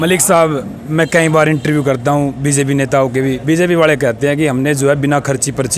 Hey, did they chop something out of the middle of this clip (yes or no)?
no